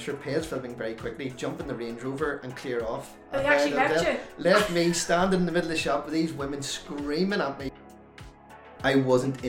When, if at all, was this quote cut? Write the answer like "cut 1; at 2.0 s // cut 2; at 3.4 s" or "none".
cut 1; at 8.2 s